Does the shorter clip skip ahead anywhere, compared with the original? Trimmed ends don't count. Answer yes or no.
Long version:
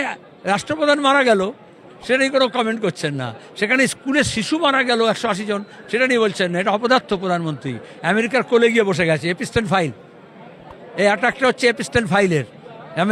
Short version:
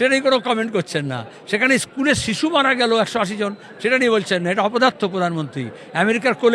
no